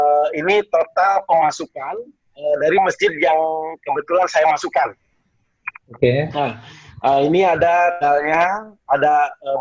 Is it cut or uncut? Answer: uncut